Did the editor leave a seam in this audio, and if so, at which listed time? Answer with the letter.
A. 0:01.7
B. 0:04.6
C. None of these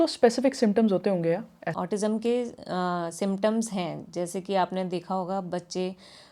A